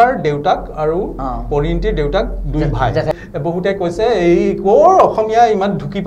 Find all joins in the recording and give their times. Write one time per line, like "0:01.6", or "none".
0:03.1